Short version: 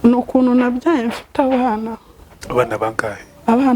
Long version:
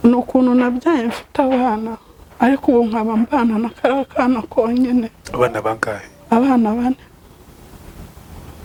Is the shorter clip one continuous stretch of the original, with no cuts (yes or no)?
no